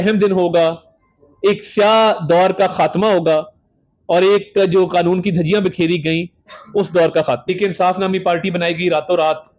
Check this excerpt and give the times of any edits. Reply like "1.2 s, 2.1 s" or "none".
7.5 s